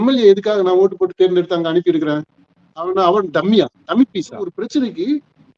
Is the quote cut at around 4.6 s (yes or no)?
yes